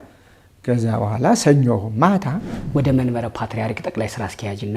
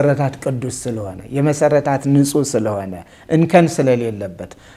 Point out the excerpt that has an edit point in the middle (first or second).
first